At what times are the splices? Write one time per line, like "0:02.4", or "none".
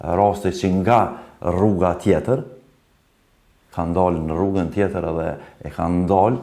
none